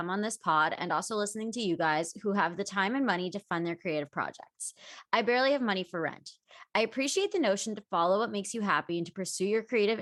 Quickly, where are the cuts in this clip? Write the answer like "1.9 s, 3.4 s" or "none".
none